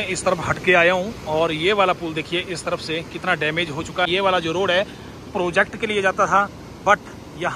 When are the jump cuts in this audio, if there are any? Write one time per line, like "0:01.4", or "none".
0:04.1